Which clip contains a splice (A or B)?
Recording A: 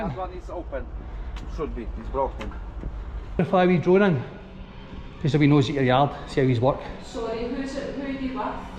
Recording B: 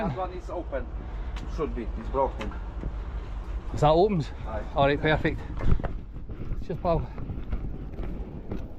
A